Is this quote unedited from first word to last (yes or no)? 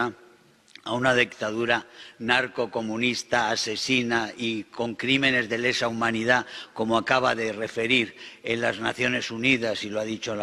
yes